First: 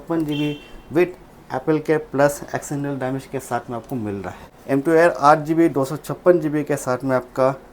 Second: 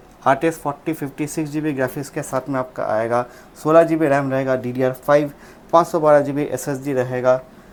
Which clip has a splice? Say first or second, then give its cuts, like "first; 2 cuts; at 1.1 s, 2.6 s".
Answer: first; 1 cut; at 4.4 s